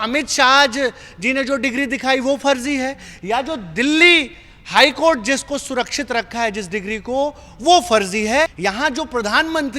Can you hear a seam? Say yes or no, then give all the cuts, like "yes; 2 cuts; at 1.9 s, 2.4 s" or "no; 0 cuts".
yes; 1 cut; at 8.6 s